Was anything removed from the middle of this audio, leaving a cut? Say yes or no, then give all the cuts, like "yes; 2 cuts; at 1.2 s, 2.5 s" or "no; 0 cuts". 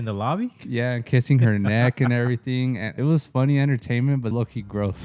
yes; 2 cuts; at 2.9 s, 4.3 s